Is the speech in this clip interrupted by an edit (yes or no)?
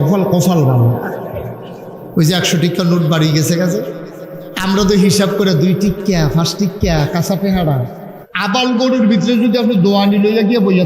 yes